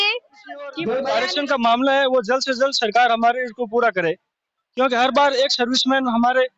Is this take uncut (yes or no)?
no